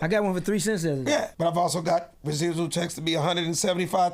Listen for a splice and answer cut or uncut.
cut